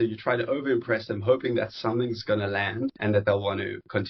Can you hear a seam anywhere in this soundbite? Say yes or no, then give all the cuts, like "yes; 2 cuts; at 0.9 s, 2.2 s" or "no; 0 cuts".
yes; 1 cut; at 3.0 s